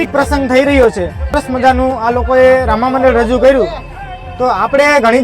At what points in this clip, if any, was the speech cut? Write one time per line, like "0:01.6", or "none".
0:01.4